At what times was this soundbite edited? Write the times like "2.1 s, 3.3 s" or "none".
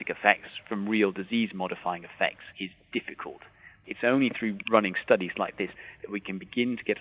2.5 s, 3.7 s, 4.6 s, 5.7 s

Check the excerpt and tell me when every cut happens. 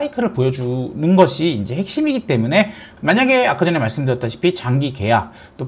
2.9 s

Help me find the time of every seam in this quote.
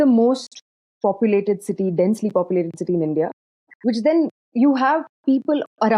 4.4 s

